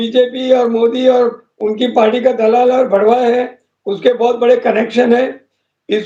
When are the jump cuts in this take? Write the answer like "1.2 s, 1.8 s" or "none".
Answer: none